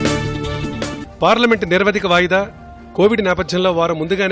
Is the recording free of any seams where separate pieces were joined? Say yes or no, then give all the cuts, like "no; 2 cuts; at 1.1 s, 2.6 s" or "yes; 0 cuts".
no; 1 cut; at 1.1 s